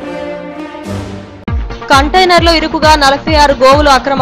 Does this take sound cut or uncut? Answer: cut